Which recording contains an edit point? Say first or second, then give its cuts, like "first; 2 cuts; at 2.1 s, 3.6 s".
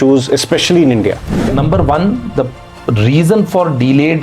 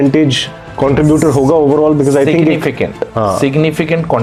first; 1 cut; at 1.4 s